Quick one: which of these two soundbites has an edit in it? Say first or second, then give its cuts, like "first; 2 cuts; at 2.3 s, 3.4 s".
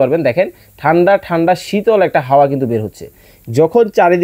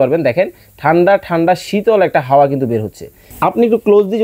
second; 1 cut; at 3.3 s